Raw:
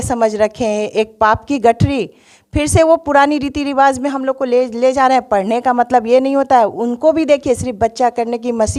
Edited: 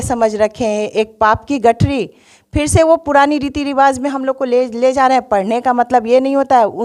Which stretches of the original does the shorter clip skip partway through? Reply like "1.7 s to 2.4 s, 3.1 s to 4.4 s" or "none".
none